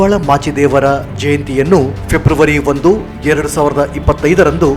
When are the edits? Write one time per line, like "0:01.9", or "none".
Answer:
none